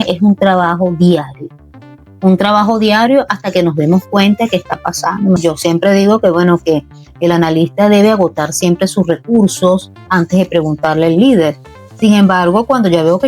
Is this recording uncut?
no; 1 cut; at 5.4 s

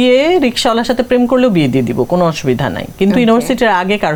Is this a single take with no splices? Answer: yes; 0 cuts

